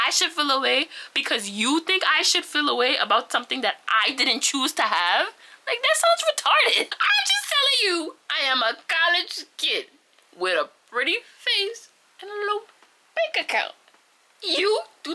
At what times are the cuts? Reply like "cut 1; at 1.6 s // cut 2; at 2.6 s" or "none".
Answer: cut 1; at 6.9 s